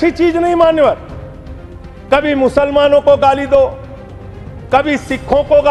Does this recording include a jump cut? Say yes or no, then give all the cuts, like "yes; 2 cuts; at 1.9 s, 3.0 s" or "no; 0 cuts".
no; 0 cuts